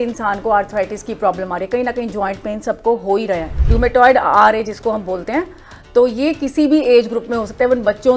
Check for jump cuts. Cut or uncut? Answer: cut